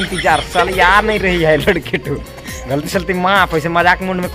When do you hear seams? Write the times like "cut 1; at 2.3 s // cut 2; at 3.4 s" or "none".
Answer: none